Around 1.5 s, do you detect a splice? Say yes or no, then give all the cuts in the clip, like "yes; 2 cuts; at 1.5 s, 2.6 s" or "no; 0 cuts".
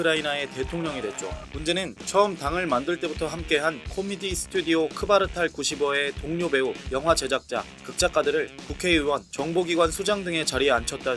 yes; 1 cut; at 1.5 s